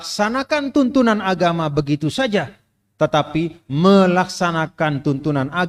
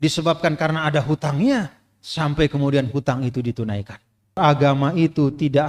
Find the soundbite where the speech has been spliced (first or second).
second